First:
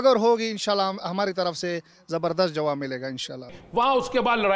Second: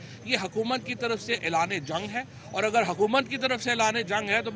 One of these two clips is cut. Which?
first; 1 cut; at 3.6 s

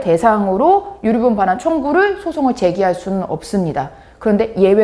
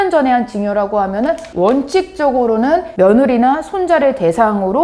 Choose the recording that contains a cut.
second; 2 cuts; at 1.5 s, 2.9 s

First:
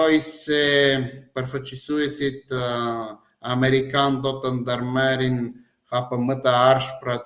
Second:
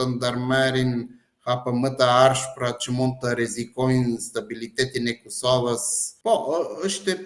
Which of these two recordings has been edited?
second; 1 cut; at 6.1 s

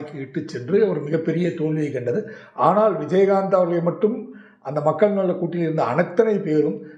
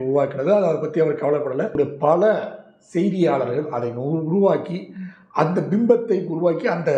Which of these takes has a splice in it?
second; 1 cut; at 1.7 s

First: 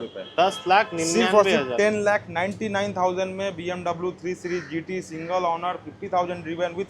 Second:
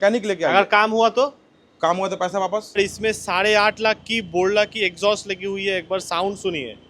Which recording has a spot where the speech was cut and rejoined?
second; 1 cut; at 2.8 s

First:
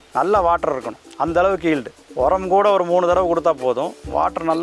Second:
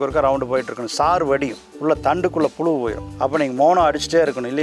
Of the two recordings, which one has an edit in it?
second; 2 cuts; at 1.6 s, 3.0 s

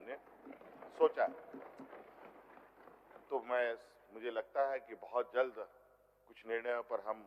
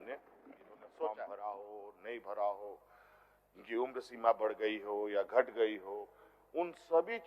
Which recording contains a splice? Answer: second; 1 cut; at 1.3 s

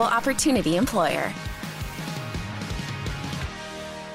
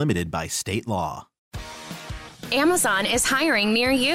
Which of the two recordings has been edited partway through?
second; 1 cut; at 1.3 s

